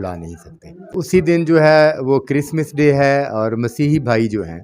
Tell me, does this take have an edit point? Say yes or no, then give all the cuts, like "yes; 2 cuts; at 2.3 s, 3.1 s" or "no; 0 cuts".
yes; 1 cut; at 1.0 s